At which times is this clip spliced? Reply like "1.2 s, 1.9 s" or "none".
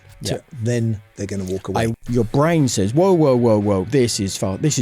2.0 s